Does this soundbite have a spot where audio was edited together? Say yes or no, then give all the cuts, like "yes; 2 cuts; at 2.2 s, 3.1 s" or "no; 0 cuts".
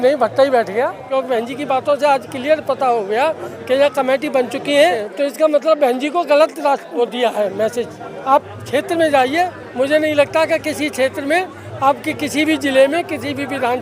yes; 4 cuts; at 1.0 s, 5.1 s, 6.9 s, 8.1 s